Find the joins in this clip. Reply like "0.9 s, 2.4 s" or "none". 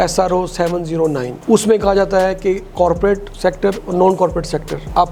none